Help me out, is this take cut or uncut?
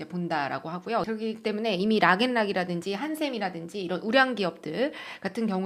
cut